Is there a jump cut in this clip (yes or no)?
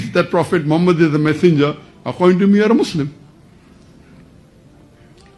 no